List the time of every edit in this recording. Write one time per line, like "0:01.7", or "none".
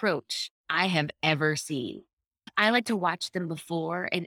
0:02.4